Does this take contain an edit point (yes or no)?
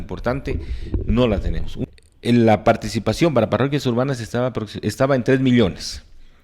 yes